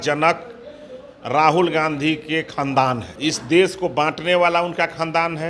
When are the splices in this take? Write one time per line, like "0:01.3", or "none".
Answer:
0:03.1

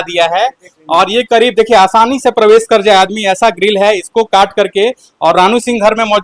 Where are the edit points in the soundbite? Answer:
none

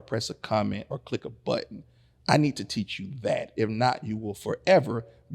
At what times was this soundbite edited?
none

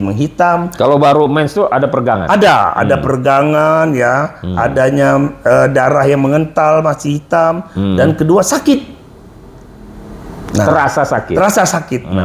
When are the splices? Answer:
none

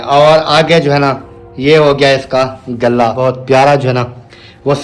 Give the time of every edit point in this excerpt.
0:03.2

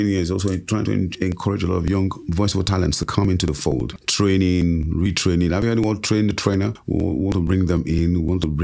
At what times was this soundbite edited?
0:02.2
0:03.9
0:06.8

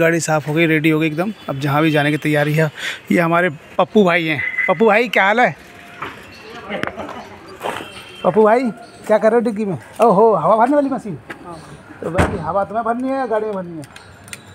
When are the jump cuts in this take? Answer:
0:04.6
0:06.9

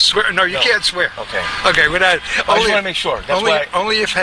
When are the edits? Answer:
0:02.5

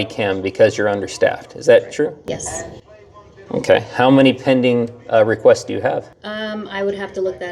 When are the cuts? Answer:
none

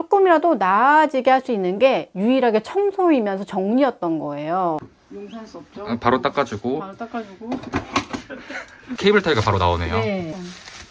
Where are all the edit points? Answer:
0:04.8

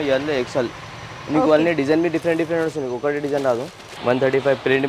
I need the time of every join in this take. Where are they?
0:03.9

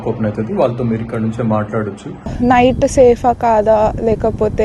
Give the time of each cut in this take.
0:02.3

